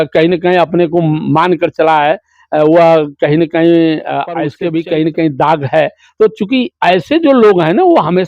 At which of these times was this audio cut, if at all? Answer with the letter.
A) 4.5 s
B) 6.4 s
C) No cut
A